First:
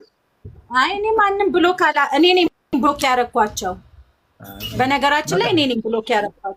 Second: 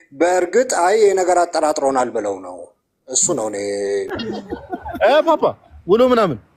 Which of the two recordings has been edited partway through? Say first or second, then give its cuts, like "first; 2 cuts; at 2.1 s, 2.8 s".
second; 1 cut; at 4.2 s